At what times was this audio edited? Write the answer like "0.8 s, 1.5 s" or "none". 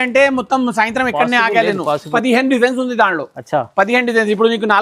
2.1 s